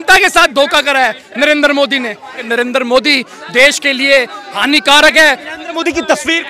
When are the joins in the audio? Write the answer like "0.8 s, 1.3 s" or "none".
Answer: 2.4 s, 5.4 s